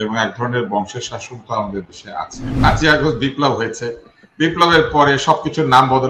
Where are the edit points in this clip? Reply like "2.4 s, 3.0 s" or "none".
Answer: 2.4 s